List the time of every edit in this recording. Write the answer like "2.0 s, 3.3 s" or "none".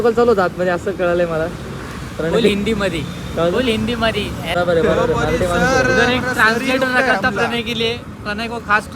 4.4 s